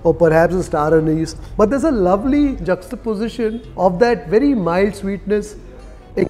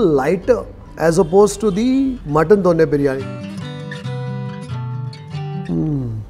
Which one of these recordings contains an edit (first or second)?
second